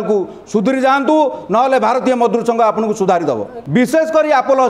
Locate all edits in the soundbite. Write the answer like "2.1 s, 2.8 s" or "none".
3.5 s